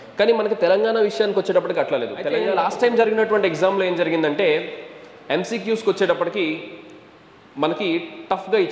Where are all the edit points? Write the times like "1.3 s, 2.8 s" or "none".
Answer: 2.4 s